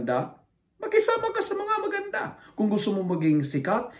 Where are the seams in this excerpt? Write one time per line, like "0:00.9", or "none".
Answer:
none